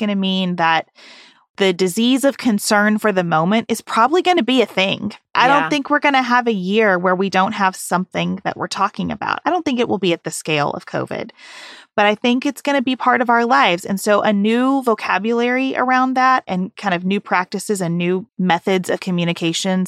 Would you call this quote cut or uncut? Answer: cut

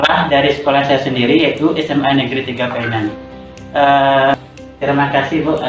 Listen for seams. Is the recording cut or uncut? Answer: cut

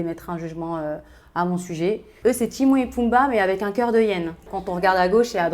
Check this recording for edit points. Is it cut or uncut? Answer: cut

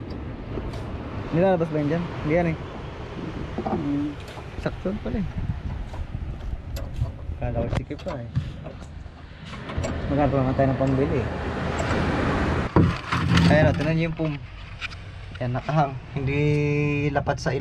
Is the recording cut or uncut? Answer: cut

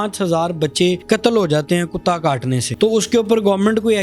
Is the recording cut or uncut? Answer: cut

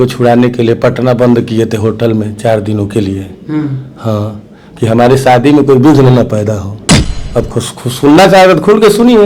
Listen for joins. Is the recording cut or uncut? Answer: cut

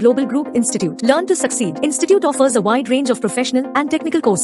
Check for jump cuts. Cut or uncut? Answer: uncut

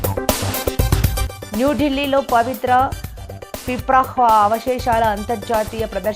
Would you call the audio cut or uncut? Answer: cut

